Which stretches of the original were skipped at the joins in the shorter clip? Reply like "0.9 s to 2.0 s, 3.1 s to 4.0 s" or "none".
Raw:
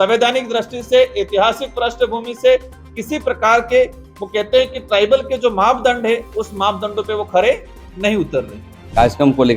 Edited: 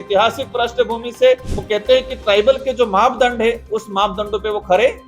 2.8 s to 4.2 s